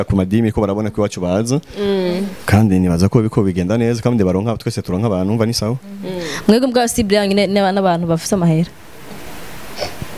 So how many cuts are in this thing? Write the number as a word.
zero